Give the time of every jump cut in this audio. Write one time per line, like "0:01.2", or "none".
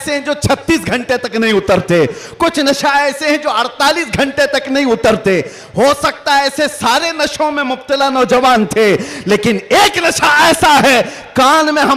none

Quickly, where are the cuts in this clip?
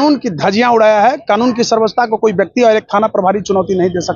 none

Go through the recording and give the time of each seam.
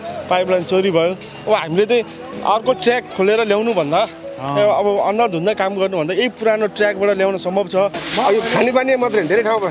0:08.0

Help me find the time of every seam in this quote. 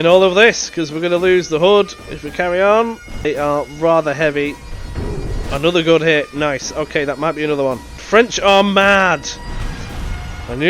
0:03.2
0:08.0

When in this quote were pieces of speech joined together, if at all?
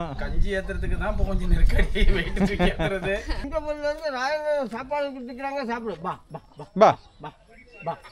0:03.4

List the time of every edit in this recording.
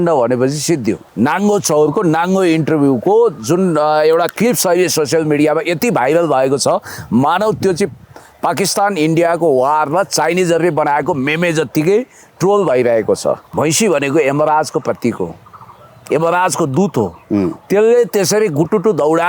0:01.0
0:13.5

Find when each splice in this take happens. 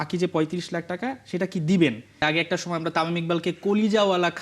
0:02.2

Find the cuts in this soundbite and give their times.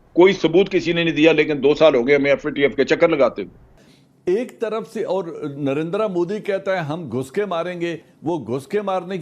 0:03.7
0:08.1

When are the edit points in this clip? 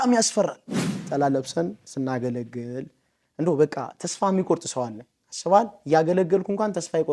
0:01.1

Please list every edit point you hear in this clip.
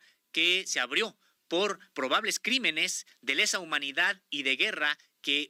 none

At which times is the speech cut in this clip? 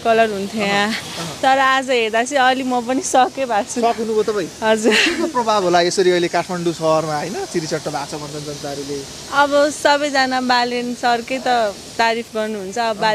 none

